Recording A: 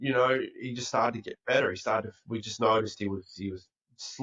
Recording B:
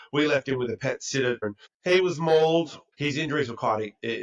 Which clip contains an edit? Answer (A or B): B